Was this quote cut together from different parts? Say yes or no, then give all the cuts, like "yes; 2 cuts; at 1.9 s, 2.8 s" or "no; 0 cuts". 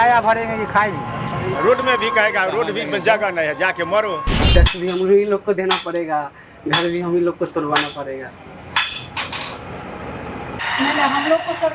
yes; 3 cuts; at 1.5 s, 4.4 s, 10.5 s